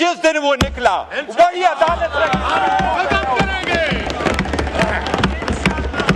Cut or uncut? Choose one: uncut